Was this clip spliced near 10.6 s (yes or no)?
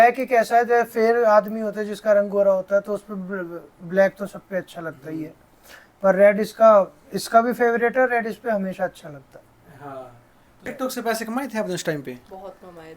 yes